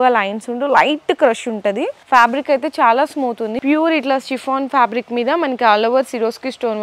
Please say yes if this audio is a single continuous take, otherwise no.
no